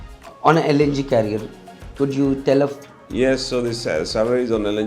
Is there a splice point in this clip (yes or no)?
yes